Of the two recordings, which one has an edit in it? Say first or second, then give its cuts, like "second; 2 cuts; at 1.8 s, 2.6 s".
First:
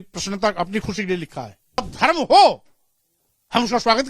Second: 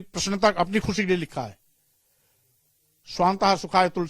first; 1 cut; at 1.8 s